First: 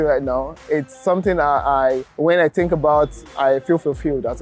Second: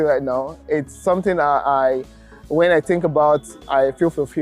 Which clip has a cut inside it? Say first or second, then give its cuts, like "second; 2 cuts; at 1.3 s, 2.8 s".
first; 1 cut; at 2.1 s